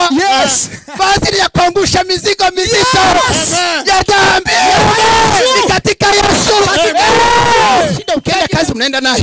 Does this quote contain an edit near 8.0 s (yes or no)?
yes